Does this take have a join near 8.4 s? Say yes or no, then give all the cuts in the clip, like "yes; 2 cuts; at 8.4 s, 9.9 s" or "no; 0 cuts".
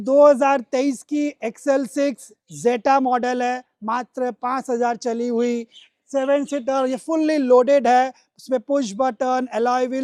no; 0 cuts